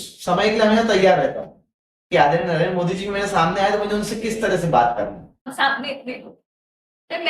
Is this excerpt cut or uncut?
cut